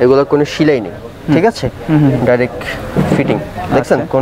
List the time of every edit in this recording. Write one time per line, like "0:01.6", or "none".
none